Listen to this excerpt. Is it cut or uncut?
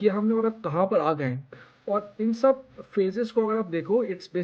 uncut